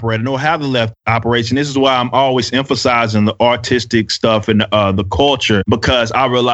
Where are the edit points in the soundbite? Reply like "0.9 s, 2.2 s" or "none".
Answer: 5.6 s